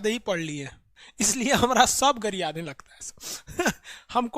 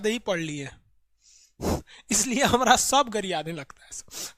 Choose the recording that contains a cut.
first; 1 cut; at 1.0 s

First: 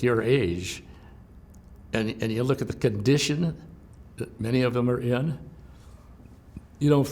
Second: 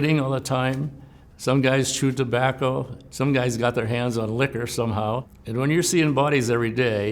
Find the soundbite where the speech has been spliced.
second; 1 cut; at 5.4 s

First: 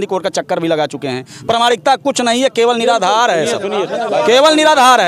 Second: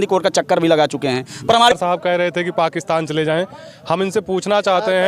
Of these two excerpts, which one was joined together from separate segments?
second; 1 cut; at 1.7 s

